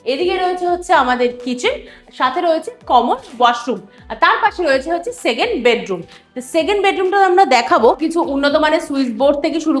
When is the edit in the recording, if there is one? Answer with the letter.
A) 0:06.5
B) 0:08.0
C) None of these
B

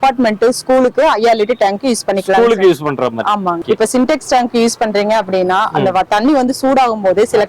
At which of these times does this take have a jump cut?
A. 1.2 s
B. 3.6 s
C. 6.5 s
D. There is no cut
B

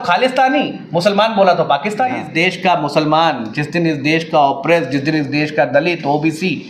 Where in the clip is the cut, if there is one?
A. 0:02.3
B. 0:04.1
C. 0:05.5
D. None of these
A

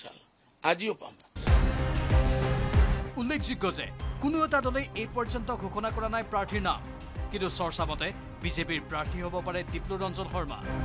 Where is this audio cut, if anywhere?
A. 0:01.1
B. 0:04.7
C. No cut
A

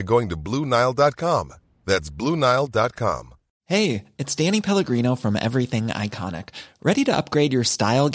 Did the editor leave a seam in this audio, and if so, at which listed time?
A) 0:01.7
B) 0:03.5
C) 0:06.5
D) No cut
B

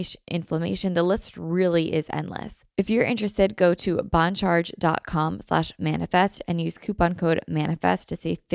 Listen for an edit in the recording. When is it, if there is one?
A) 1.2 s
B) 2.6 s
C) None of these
B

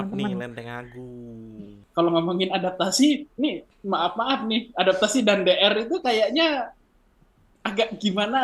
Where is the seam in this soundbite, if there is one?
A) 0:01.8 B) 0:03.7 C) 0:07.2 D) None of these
A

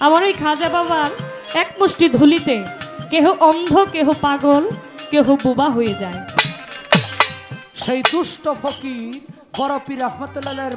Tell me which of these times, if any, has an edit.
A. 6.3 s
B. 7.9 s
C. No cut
A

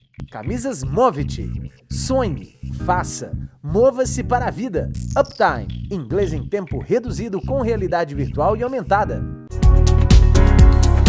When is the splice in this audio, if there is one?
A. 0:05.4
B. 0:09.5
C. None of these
B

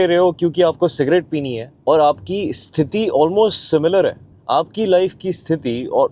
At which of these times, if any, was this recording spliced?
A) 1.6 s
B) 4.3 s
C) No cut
A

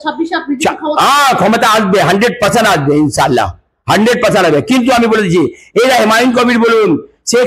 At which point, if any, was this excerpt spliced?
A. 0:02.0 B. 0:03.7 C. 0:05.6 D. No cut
D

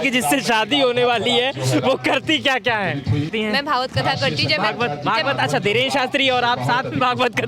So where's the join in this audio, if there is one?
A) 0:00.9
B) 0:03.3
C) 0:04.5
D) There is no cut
B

